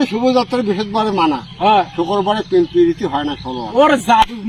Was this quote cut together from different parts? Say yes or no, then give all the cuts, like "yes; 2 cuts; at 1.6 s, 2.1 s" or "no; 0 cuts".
no; 0 cuts